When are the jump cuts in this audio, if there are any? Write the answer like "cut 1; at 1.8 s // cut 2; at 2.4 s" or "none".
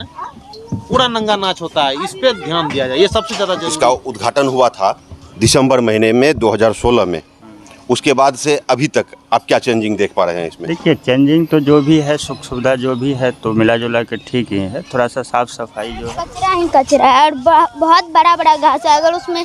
cut 1; at 3.6 s // cut 2; at 16.2 s

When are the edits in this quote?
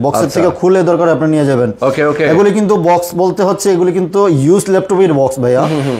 none

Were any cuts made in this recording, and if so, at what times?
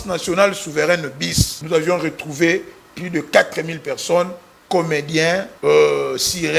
cut 1; at 1.5 s // cut 2; at 5.5 s

